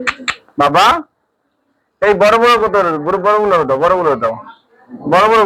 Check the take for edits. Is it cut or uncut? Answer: uncut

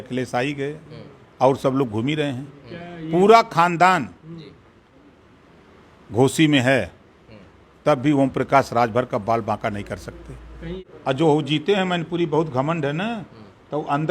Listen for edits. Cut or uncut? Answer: cut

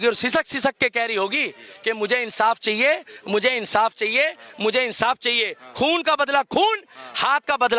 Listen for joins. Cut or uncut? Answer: uncut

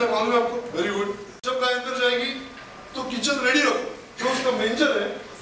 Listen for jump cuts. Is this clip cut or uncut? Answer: cut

